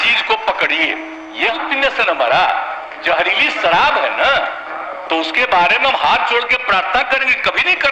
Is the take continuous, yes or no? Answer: no